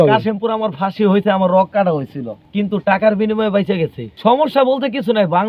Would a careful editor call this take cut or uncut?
cut